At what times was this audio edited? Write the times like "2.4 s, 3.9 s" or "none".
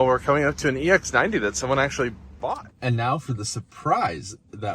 2.3 s